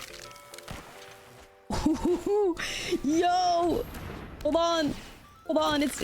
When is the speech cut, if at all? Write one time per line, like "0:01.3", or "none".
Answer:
0:01.3